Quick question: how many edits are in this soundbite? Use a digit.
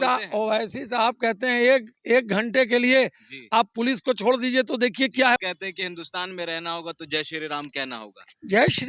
1